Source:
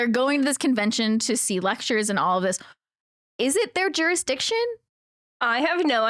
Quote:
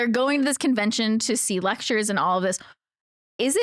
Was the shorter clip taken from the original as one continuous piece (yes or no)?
yes